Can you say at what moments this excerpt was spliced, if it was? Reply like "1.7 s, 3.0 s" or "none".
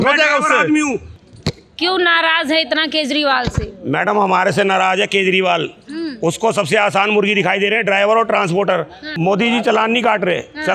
1.1 s, 9.0 s